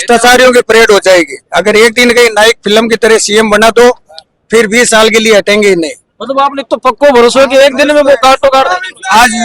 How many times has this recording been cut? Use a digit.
0